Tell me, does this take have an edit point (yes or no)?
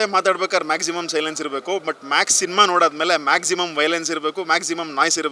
no